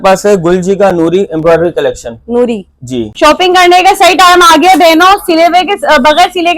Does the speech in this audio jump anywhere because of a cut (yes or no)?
yes